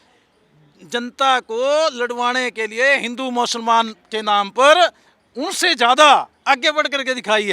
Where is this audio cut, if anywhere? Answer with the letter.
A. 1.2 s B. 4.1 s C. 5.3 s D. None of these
D